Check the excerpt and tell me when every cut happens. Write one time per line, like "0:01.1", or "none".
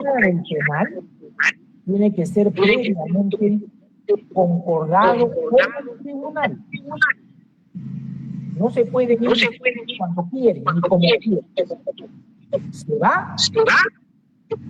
none